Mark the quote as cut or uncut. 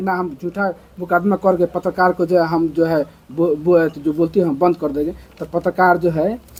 uncut